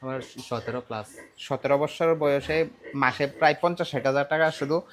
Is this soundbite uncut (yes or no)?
yes